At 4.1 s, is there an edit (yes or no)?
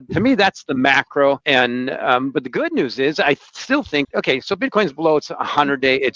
yes